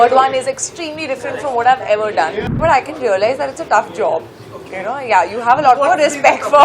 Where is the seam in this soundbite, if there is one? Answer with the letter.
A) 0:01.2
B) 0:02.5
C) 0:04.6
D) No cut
B